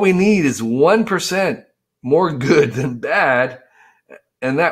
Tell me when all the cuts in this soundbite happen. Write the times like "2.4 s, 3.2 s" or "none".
none

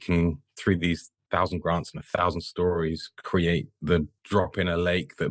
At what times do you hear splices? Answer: 1.2 s, 4.2 s

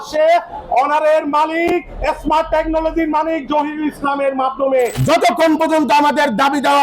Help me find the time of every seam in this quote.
5.0 s

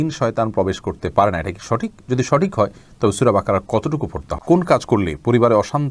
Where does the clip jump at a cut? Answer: 4.3 s

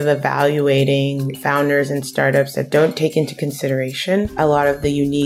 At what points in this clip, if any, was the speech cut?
1.3 s, 4.3 s

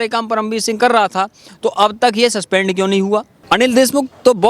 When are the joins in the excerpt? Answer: 3.3 s

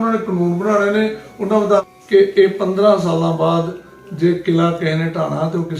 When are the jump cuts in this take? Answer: 1.8 s

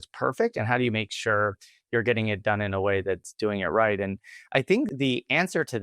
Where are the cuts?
4.9 s

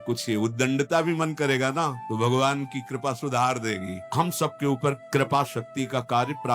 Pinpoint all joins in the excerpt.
2.0 s, 4.0 s, 5.0 s

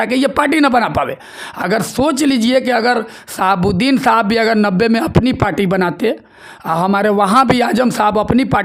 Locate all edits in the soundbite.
none

